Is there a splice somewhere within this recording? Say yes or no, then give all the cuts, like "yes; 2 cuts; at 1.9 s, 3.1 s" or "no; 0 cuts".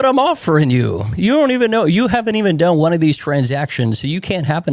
no; 0 cuts